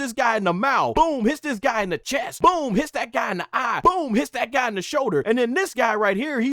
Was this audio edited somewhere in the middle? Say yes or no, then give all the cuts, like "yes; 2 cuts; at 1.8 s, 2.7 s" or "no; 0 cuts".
yes; 4 cuts; at 0.9 s, 2.3 s, 3.7 s, 5.2 s